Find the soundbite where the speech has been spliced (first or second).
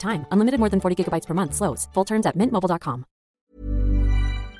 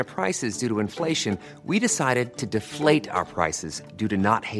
first